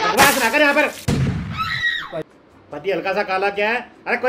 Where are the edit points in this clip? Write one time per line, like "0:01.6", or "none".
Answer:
0:02.3